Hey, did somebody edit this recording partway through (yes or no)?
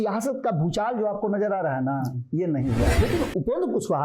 yes